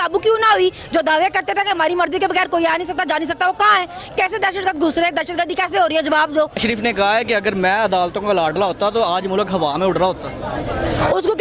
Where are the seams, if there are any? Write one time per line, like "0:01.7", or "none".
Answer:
0:06.6